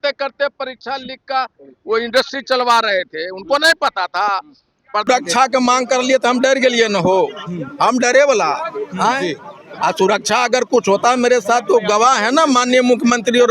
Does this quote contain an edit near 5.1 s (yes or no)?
yes